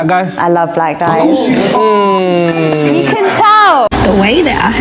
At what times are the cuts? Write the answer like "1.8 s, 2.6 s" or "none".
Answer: 3.9 s

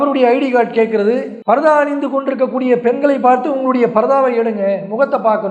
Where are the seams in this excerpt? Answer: none

